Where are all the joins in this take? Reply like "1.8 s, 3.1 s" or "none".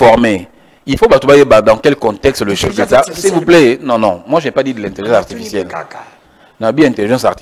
none

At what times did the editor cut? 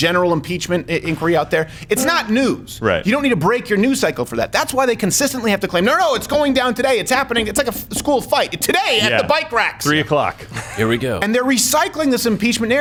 none

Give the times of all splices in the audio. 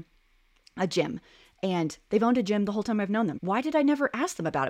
3.4 s

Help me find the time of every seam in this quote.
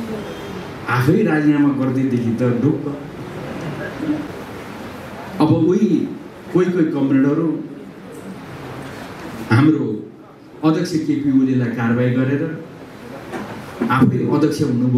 4.3 s

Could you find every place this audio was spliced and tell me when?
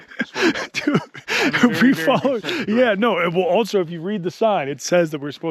none

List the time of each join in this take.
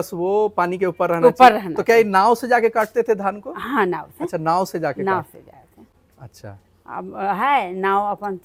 none

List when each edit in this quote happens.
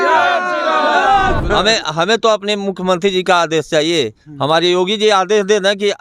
1.4 s

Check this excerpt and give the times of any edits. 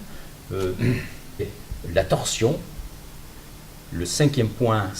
none

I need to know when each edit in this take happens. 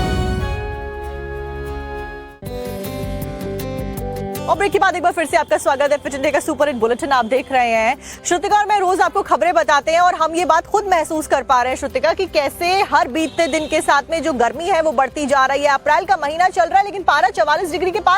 14.1 s

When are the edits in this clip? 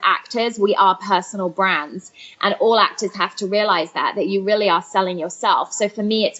none

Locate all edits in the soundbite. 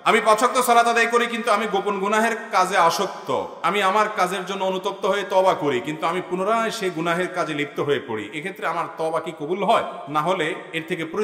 none

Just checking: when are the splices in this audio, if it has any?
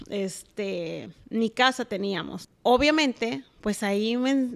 2.3 s

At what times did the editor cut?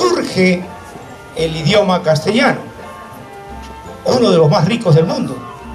none

